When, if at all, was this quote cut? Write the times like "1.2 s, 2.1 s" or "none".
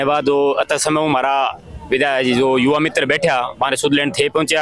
none